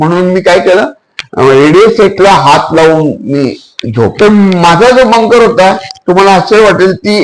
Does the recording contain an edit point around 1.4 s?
no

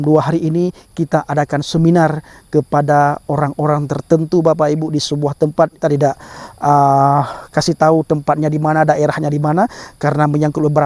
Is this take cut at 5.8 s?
yes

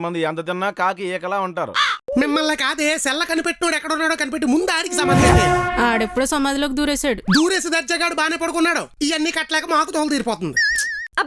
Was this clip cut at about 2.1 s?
yes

